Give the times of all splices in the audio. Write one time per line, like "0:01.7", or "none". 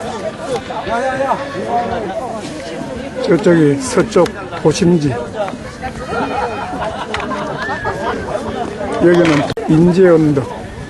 0:09.5